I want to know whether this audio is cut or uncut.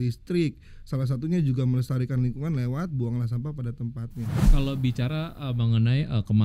cut